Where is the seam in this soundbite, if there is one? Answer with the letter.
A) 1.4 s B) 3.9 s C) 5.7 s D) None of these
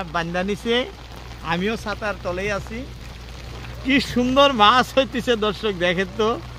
D